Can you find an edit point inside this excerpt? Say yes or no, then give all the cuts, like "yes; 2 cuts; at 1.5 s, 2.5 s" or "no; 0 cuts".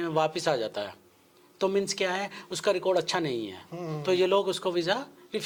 no; 0 cuts